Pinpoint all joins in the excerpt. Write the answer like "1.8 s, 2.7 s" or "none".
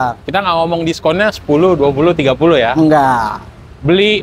none